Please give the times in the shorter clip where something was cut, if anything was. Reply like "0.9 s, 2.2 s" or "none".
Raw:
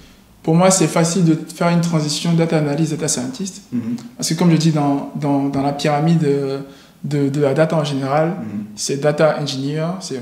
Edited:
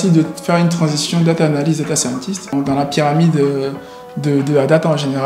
2.5 s

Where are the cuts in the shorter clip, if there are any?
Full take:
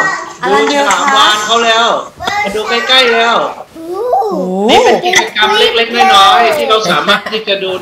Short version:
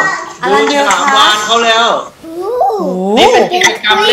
2.2 s

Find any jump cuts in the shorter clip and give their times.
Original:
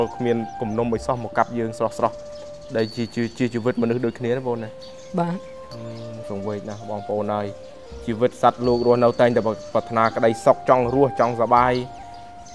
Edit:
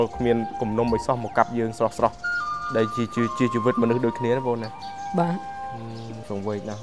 none

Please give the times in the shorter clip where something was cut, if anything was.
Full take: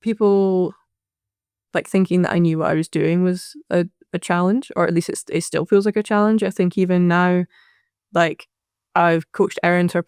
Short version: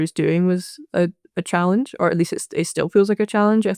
none

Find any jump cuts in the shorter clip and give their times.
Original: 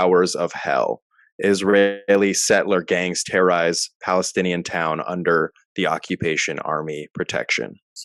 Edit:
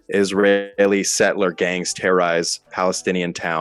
none

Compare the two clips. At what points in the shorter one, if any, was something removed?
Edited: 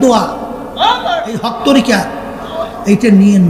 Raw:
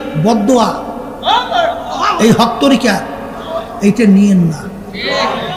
1.5 s

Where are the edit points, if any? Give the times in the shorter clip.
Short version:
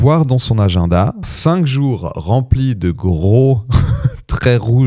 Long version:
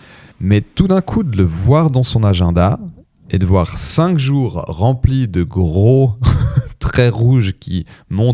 1.3 s

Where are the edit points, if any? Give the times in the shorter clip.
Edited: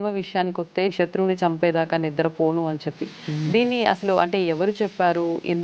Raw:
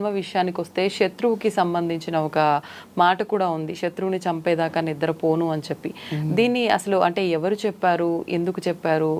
0.9 s

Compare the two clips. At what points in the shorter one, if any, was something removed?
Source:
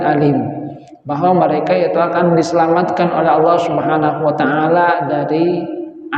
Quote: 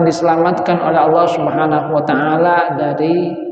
none

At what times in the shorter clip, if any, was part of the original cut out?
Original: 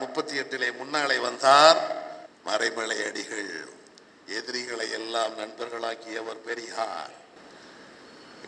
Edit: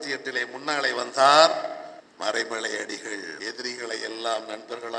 3.3 s

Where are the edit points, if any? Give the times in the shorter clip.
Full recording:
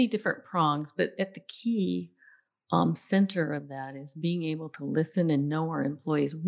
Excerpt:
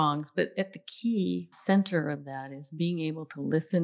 1.6 s

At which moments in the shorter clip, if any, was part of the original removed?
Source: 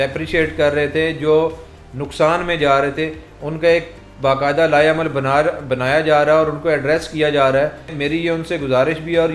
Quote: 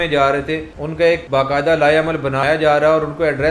1.0 s, 2.4 s

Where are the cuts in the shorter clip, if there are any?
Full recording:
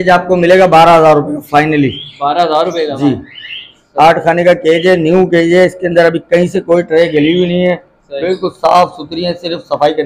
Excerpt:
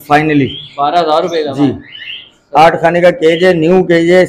none

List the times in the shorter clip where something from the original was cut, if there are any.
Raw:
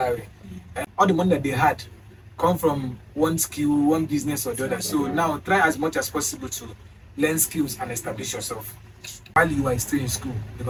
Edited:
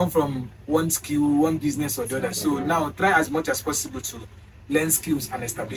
none

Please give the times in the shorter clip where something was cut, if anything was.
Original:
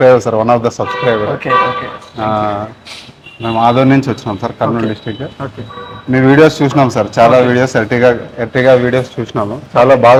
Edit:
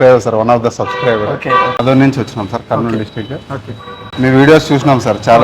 1.8 s

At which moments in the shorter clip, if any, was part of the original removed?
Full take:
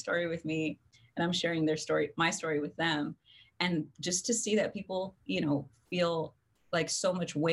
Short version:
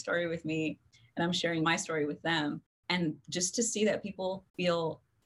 1.6 s, 2.7 s, 4.4 s

